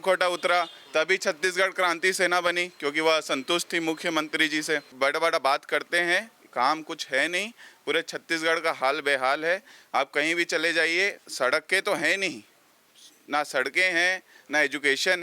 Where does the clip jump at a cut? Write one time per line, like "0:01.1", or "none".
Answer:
0:04.9
0:11.2